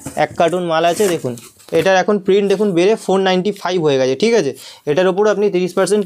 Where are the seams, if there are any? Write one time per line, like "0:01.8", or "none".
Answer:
none